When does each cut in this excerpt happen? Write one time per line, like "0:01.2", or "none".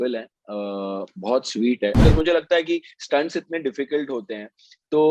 0:02.0